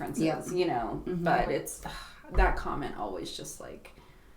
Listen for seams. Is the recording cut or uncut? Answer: cut